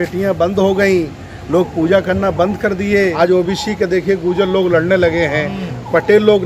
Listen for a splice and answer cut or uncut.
cut